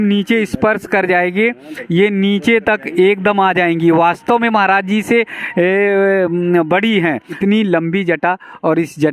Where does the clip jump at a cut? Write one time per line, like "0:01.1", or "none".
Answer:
0:07.3